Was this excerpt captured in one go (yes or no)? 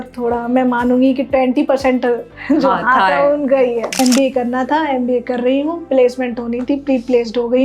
no